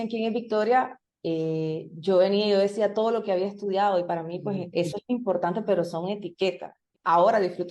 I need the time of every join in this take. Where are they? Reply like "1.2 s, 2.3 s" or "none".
6.7 s